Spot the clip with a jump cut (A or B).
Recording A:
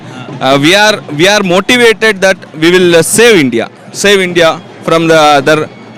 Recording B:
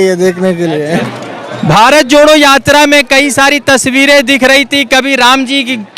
B